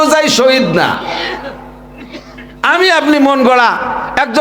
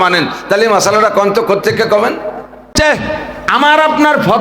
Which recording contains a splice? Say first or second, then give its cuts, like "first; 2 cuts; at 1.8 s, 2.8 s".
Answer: second; 1 cut; at 2.7 s